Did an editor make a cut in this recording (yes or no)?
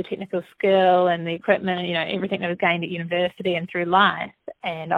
no